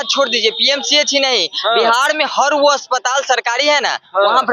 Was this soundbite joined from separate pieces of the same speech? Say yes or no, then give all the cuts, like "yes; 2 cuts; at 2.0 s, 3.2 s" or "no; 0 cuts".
no; 0 cuts